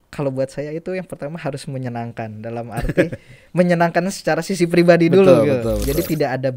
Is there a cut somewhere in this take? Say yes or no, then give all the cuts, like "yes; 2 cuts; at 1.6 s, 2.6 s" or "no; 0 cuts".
no; 0 cuts